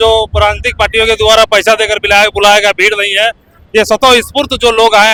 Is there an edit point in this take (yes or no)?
no